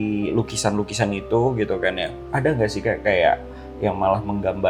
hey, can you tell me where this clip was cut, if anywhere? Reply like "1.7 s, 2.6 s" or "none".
2.2 s